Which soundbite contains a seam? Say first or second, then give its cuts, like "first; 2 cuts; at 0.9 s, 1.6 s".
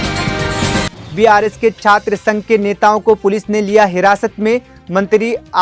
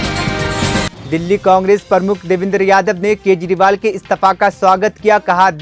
first; 1 cut; at 1.0 s